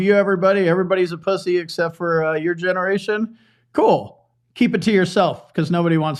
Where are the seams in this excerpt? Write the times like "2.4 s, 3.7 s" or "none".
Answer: none